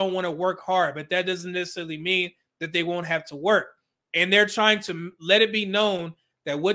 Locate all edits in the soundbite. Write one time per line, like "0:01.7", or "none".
none